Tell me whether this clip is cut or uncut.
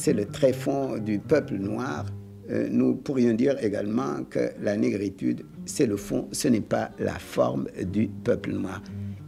uncut